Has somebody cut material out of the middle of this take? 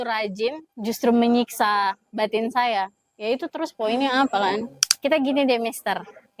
yes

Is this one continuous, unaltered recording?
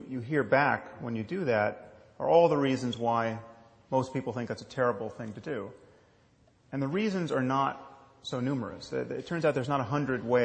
yes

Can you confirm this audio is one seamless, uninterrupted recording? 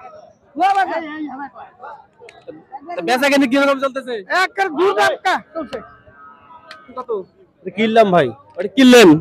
no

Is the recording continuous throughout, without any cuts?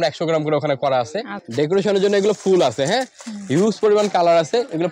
no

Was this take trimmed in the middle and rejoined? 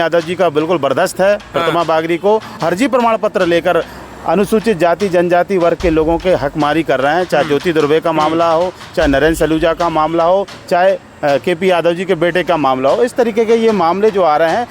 yes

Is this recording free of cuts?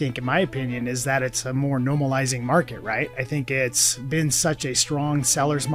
yes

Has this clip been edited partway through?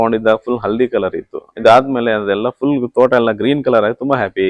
no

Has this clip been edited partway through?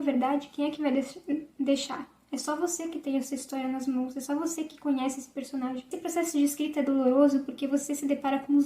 yes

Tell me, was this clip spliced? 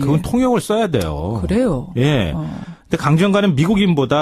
no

